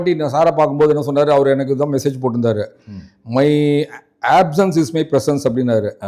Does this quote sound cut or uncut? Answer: uncut